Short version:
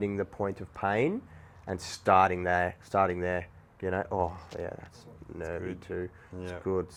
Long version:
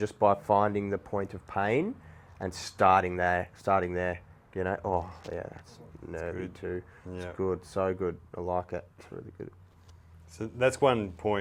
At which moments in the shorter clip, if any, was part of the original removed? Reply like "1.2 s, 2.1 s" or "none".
none